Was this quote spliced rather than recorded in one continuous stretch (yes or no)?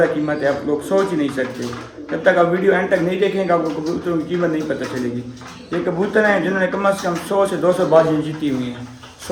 no